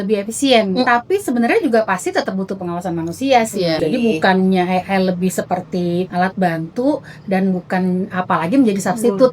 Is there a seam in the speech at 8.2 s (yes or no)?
no